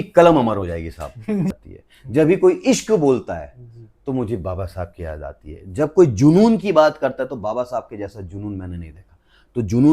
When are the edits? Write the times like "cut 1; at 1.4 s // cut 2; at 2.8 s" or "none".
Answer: cut 1; at 1.5 s